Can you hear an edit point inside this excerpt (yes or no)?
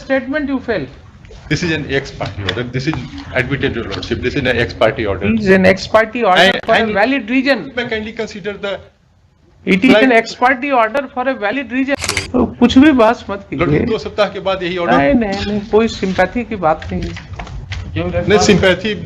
yes